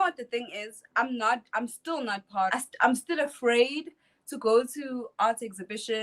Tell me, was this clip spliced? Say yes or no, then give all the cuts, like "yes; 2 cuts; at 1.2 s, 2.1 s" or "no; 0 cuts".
yes; 1 cut; at 2.5 s